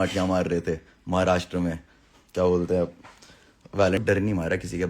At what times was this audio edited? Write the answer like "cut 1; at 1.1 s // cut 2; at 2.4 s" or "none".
cut 1; at 4.0 s

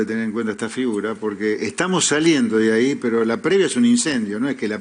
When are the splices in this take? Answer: none

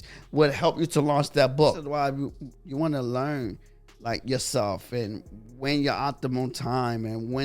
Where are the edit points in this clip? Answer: cut 1; at 1.8 s

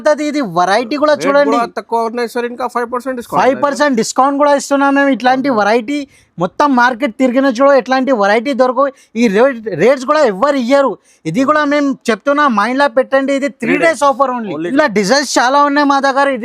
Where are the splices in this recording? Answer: cut 1; at 14.6 s

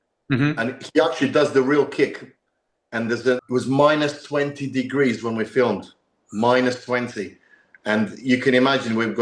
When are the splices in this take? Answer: cut 1; at 3.4 s

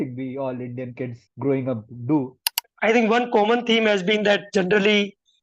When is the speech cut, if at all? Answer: cut 1; at 1.2 s // cut 2; at 2.6 s

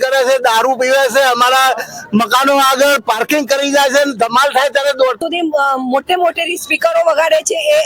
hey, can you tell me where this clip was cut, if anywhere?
cut 1; at 5.2 s

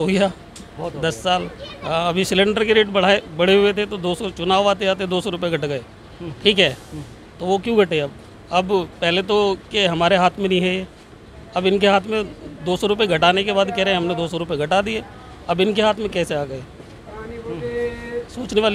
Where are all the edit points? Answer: none

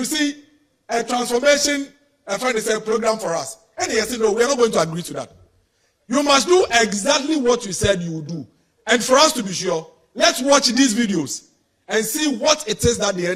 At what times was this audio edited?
none

